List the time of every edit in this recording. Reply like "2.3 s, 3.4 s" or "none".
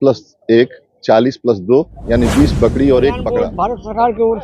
3.5 s